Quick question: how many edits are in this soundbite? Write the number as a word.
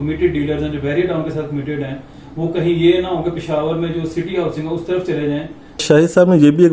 one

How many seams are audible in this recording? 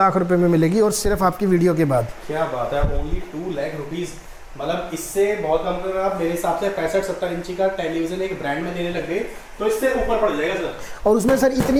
zero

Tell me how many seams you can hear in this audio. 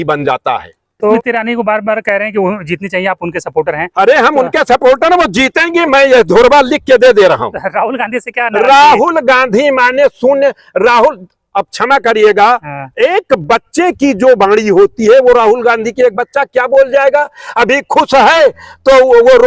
one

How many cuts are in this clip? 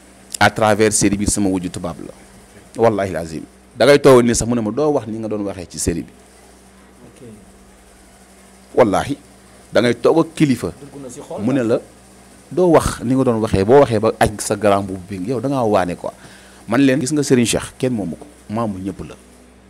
one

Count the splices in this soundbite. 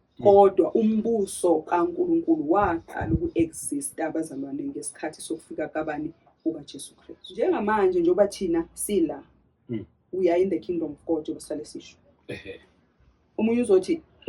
one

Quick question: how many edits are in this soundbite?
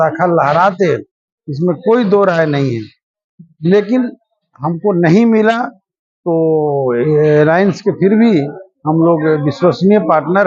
zero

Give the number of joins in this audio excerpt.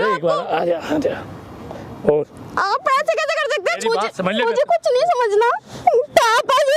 one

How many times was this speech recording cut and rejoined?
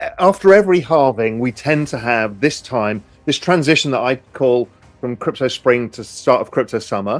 zero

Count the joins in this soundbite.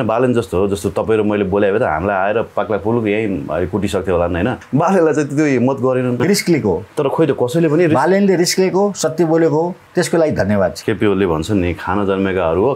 four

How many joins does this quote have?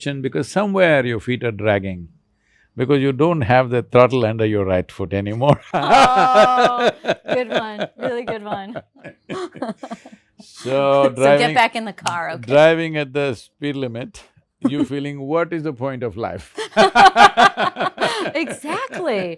one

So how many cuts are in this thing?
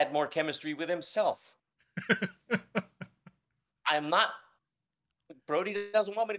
zero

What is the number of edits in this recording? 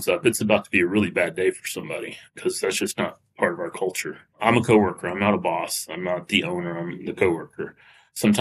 two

